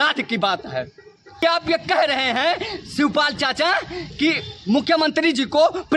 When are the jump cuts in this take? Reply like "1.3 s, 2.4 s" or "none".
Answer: 1.4 s